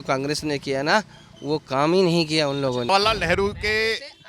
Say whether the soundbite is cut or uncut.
cut